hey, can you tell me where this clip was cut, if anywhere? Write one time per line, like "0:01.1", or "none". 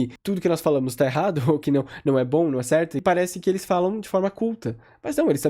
0:03.0